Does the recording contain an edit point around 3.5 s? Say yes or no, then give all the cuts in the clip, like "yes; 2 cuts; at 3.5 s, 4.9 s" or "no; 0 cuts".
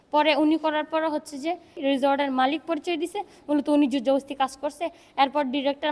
no; 1 cut; at 1.8 s